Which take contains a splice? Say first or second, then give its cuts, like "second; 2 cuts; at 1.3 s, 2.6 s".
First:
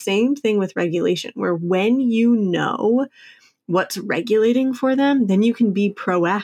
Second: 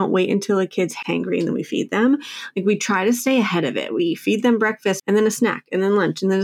second; 2 cuts; at 1.0 s, 5.0 s